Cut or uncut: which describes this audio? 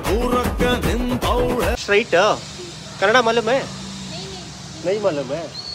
uncut